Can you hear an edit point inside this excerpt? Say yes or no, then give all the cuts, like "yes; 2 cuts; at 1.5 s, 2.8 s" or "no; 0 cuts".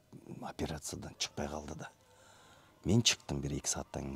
no; 0 cuts